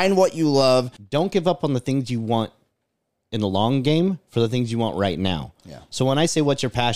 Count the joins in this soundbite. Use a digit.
1